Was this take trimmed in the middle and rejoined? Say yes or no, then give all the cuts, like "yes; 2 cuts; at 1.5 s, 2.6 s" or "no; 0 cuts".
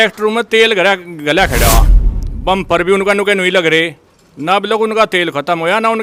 no; 0 cuts